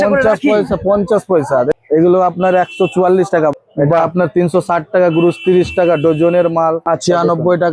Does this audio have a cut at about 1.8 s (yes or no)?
yes